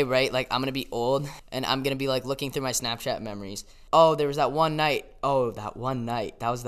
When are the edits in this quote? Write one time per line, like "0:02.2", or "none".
0:01.4
0:03.8